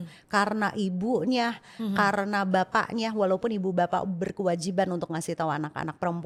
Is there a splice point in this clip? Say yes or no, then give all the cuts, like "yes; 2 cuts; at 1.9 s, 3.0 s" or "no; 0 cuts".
no; 0 cuts